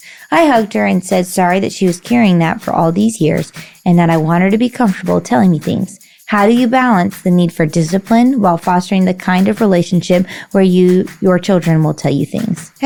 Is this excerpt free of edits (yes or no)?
yes